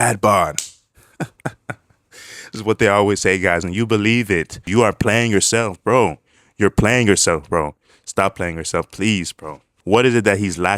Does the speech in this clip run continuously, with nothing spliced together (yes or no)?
no